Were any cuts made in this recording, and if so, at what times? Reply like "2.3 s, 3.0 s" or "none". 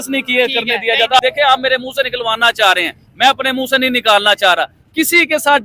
1.2 s